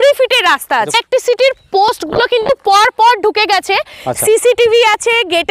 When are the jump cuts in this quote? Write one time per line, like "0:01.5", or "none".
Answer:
0:00.9